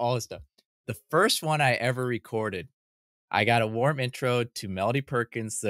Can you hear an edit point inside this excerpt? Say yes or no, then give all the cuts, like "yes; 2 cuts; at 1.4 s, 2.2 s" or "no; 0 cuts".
no; 0 cuts